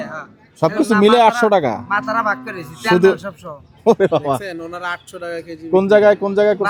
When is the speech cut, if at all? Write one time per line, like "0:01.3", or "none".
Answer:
none